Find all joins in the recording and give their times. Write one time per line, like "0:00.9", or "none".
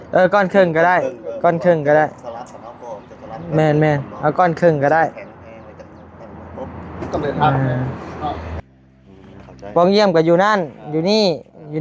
0:08.5